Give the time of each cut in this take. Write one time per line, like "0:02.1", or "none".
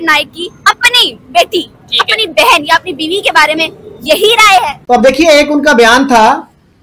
0:04.8